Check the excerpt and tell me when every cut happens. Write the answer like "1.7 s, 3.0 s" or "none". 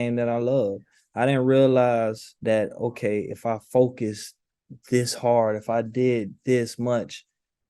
2.3 s